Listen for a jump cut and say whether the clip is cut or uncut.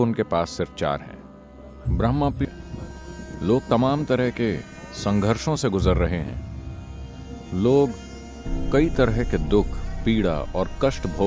cut